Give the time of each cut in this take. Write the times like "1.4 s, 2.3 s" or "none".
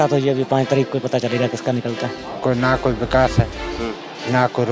2.3 s